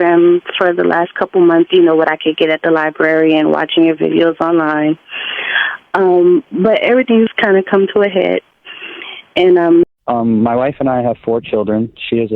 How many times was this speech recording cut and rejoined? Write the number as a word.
one